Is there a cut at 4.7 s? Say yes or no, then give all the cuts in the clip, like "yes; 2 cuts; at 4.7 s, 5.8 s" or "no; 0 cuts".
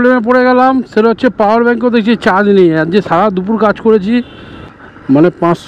yes; 1 cut; at 4.7 s